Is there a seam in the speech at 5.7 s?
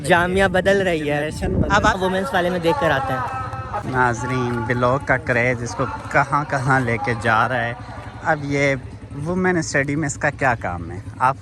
no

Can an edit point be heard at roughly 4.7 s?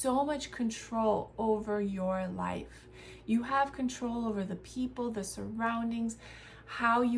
no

